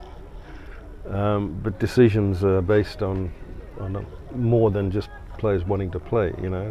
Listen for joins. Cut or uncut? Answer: uncut